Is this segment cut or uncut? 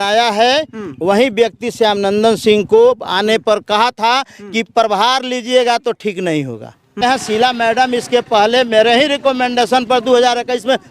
cut